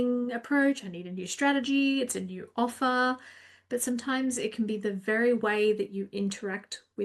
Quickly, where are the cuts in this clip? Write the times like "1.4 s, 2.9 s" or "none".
none